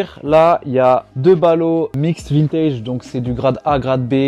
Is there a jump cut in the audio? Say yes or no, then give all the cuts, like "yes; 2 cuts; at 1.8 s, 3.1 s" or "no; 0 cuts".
no; 0 cuts